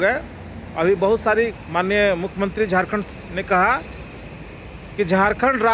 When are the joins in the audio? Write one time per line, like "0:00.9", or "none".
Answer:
0:01.5